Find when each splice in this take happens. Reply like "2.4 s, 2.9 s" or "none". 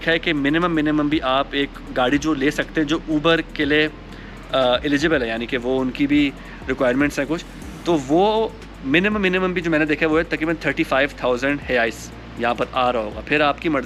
none